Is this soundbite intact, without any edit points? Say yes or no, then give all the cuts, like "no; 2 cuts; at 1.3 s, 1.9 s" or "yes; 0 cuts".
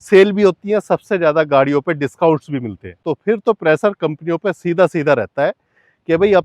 no; 1 cut; at 3.1 s